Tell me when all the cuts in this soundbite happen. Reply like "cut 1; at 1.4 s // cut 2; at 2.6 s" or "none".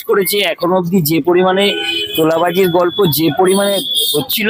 none